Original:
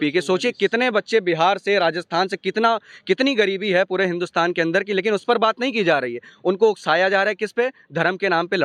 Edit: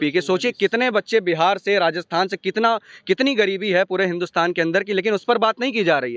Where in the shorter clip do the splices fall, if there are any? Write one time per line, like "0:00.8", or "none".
none

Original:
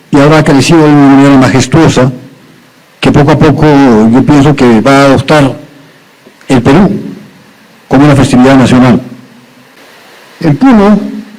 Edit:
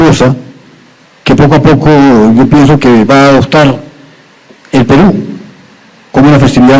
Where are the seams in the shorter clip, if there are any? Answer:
none

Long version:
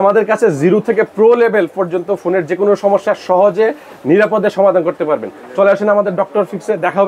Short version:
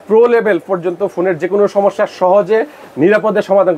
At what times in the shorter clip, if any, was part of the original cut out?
none

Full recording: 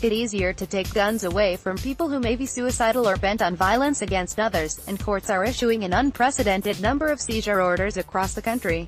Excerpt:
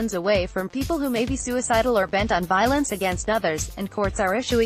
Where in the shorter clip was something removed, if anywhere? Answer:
none

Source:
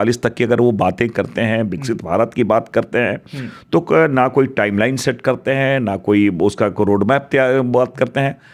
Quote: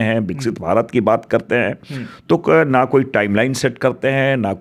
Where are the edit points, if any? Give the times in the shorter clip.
none

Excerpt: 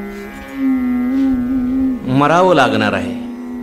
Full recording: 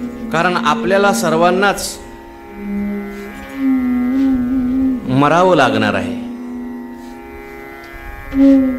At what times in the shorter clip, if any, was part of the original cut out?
none

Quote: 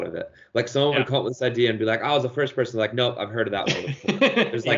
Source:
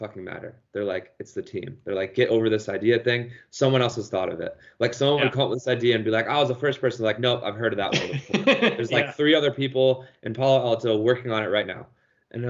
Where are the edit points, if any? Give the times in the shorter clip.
none

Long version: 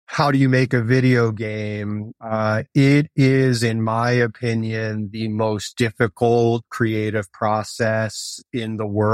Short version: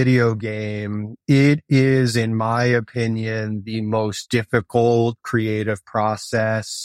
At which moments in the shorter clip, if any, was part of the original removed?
0:01.2

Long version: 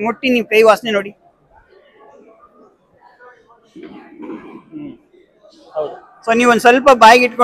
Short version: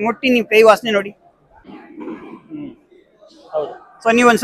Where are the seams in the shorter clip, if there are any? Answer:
0:01.7

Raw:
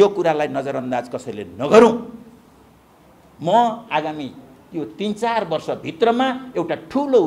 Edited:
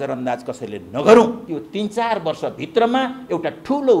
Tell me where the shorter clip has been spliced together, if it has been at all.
0:01.4

